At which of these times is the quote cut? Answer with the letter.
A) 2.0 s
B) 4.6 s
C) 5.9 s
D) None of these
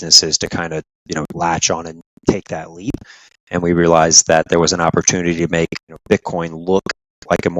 C